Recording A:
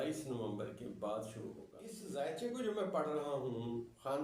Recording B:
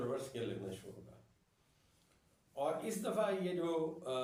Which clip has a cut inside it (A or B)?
A